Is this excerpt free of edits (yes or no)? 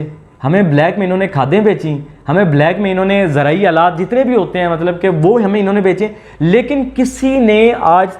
yes